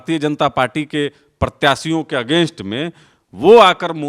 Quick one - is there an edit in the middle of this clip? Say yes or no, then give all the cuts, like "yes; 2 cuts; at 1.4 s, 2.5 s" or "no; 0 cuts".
no; 0 cuts